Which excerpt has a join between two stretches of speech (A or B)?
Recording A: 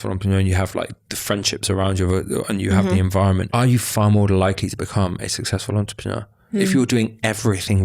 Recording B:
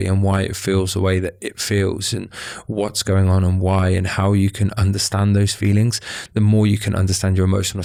A